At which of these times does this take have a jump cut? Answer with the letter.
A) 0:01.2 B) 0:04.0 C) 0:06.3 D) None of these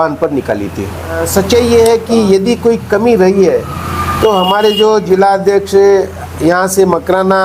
A